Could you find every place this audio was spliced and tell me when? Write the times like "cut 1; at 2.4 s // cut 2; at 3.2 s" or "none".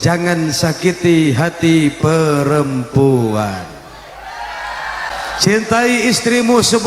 cut 1; at 5.1 s